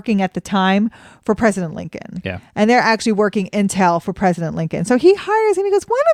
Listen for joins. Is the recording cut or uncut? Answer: uncut